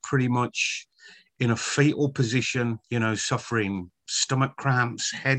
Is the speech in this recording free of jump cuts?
no; 1 cut; at 2.8 s

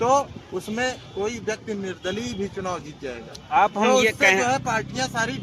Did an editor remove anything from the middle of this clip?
yes; 1 cut; at 1.2 s

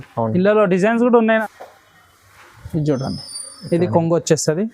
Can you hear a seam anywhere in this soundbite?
yes; 1 cut; at 1.4 s

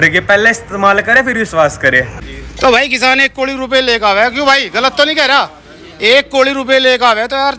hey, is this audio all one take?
no; 1 cut; at 2.1 s

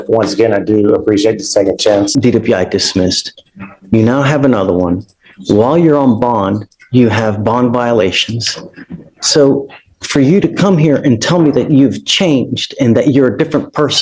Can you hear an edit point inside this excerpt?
yes; 1 cut; at 2.1 s

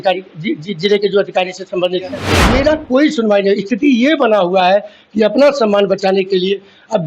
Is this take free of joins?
no; 1 cut; at 2.3 s

